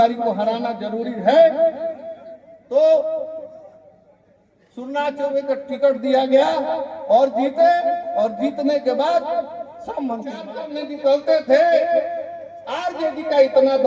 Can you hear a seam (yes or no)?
yes